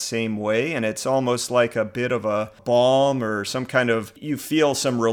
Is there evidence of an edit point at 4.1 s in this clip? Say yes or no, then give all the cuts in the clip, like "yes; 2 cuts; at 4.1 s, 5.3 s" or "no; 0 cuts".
yes; 2 cuts; at 2.6 s, 4.1 s